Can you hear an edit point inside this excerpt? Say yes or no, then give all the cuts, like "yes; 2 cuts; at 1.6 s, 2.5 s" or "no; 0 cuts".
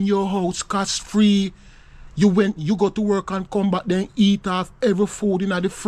no; 0 cuts